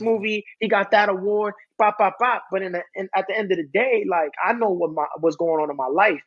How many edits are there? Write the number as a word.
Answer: zero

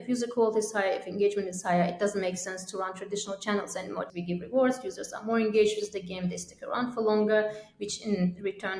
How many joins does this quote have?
one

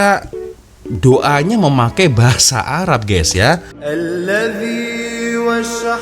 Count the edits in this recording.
one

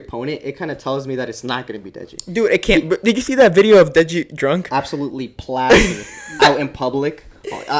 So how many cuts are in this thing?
zero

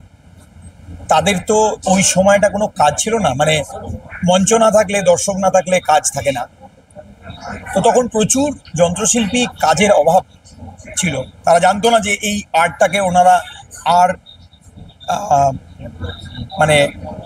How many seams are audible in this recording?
zero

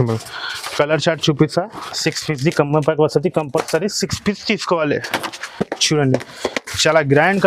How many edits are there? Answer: one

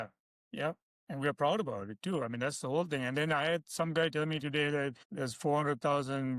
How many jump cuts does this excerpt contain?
two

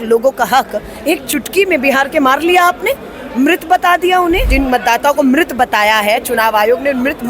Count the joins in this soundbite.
one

